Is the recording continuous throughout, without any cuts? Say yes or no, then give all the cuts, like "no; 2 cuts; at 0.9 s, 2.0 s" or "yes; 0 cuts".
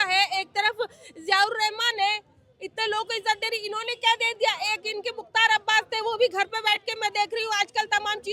yes; 0 cuts